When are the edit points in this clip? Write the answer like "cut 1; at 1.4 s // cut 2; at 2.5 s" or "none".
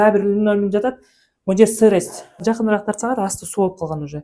cut 1; at 2.4 s